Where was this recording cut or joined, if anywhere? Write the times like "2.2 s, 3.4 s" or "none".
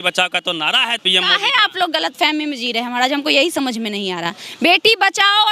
1.0 s